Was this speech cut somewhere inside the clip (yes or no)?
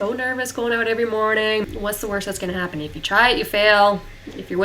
yes